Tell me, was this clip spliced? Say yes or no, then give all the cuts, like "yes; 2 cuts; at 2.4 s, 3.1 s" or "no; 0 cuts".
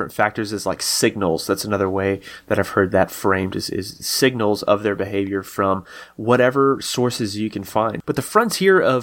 yes; 1 cut; at 8.0 s